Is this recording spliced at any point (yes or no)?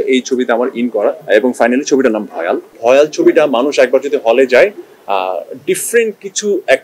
yes